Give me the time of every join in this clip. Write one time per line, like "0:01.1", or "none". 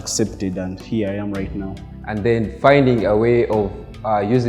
0:01.7